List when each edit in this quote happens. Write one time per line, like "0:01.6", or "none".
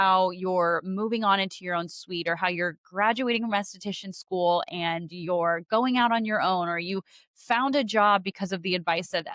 none